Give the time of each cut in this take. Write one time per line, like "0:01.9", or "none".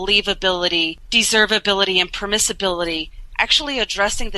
0:01.0